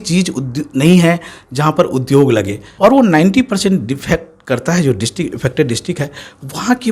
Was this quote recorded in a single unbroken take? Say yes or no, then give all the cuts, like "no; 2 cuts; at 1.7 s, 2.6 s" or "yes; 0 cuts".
no; 1 cut; at 2.6 s